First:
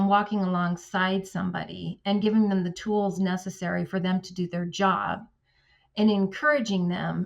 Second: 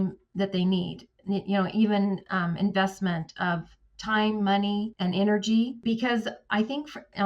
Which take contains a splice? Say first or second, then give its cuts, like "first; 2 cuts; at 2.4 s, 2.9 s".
second; 2 cuts; at 4.9 s, 5.8 s